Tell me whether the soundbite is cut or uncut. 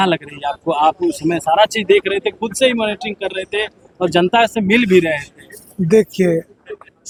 uncut